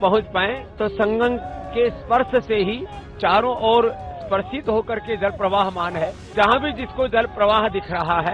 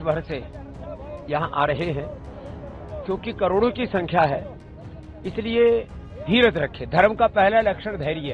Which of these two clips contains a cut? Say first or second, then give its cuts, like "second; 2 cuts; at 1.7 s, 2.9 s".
first; 1 cut; at 6.2 s